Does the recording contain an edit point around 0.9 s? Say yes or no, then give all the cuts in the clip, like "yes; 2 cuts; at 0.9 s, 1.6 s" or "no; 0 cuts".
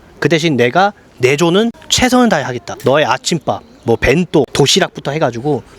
no; 2 cuts; at 2.3 s, 4.5 s